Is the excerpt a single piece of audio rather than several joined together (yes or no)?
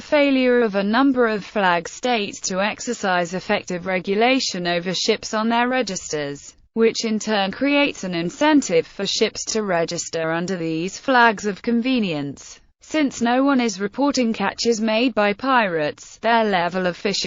yes